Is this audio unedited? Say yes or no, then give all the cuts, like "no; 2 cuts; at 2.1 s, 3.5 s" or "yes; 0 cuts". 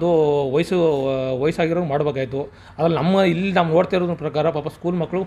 yes; 0 cuts